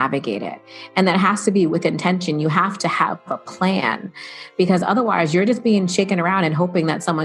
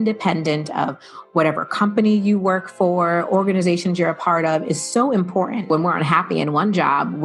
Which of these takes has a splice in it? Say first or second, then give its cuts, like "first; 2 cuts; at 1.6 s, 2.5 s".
second; 1 cut; at 5.7 s